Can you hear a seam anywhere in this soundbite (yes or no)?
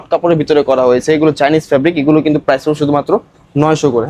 no